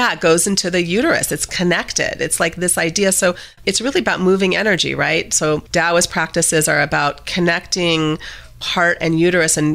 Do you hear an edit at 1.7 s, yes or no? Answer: no